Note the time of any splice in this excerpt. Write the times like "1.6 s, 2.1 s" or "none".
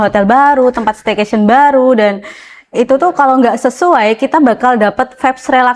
none